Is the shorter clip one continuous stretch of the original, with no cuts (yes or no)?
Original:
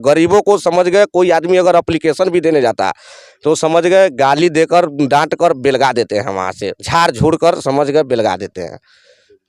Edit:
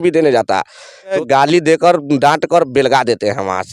no